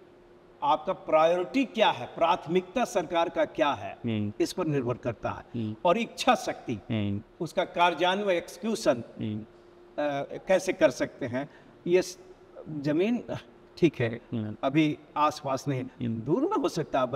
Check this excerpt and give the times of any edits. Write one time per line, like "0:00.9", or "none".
none